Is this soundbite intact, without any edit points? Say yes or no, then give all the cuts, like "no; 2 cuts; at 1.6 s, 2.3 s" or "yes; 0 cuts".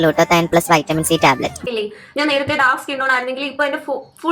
no; 1 cut; at 1.6 s